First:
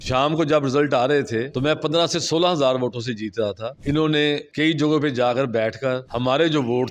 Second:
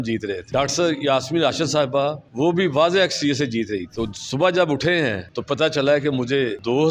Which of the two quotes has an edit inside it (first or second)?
first